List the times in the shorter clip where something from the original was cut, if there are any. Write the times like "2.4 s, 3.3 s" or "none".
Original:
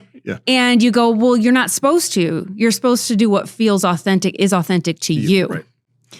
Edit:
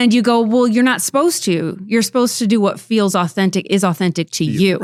none